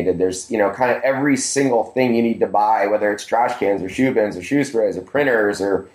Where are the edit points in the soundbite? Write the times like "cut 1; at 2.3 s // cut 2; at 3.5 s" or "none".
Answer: none